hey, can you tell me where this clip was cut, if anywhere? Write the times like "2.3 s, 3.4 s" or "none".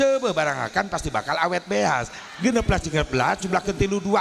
2.1 s